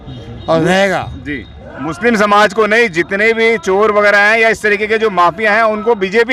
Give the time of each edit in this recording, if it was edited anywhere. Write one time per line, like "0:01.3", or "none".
none